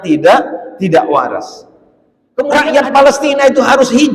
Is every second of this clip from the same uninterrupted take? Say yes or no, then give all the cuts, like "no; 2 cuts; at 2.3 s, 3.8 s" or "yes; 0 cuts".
no; 1 cut; at 2.5 s